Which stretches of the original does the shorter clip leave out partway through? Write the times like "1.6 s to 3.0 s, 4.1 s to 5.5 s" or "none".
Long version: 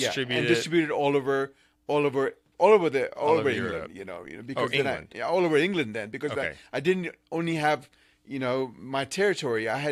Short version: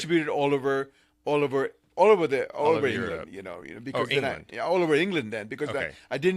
none